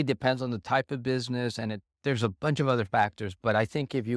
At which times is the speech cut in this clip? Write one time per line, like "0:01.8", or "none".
none